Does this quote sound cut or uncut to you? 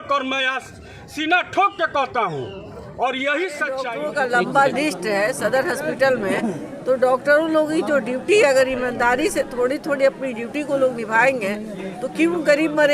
cut